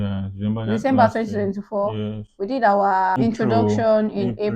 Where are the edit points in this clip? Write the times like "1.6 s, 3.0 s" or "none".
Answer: 3.2 s